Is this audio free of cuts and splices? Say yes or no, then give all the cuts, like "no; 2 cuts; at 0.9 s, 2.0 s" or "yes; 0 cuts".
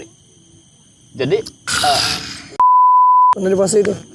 no; 2 cuts; at 2.4 s, 3.4 s